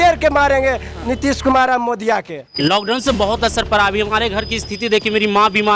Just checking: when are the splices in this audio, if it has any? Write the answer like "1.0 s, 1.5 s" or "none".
2.5 s